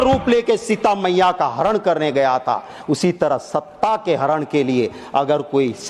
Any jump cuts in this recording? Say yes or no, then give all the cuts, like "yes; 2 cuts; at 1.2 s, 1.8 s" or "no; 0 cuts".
no; 0 cuts